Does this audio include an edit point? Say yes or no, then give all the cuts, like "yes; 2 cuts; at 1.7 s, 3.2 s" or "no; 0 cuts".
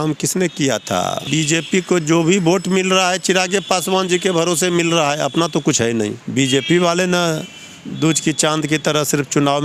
yes; 2 cuts; at 1.3 s, 6.2 s